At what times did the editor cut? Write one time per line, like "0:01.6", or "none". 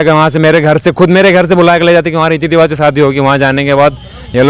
none